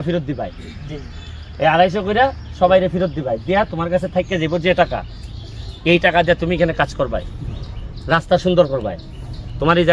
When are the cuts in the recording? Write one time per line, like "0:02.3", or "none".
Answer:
none

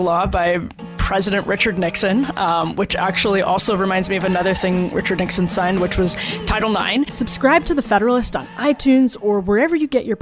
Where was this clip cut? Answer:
0:07.1

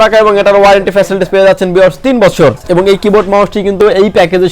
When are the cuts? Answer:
0:02.6

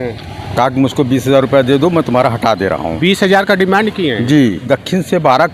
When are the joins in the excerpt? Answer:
0:04.6

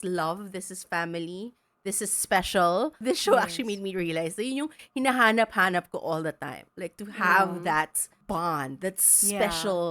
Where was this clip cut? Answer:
0:03.0
0:08.1

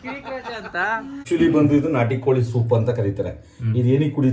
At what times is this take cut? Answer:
0:01.2

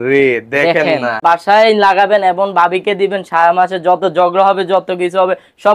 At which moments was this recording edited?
0:01.2

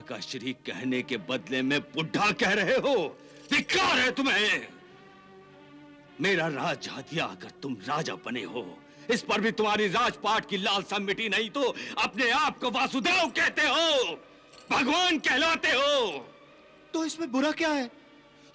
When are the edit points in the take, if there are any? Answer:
none

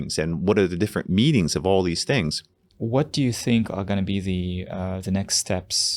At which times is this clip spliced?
0:02.7

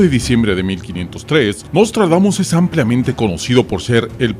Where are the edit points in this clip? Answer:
0:01.2

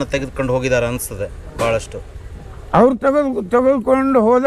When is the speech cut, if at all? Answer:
none

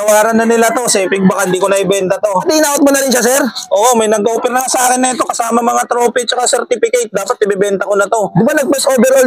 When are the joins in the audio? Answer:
0:02.4

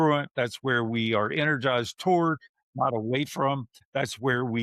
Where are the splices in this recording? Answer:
0:03.7

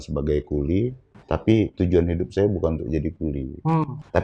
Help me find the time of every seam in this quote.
none

